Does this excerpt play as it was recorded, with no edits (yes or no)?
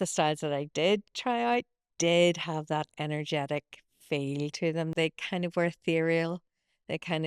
no